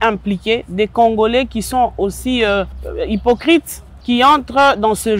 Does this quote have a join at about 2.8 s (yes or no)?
yes